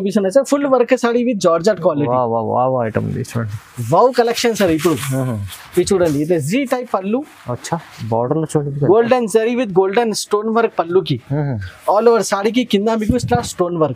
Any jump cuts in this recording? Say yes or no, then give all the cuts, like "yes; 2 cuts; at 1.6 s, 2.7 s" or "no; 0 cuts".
no; 0 cuts